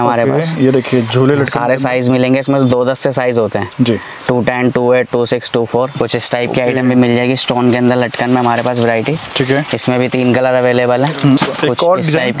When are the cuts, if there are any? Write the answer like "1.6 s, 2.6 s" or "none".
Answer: 5.9 s, 11.4 s